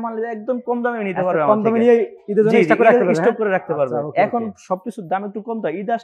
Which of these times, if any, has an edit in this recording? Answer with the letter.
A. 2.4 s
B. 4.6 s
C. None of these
C